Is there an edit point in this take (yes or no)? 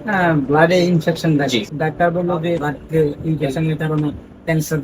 yes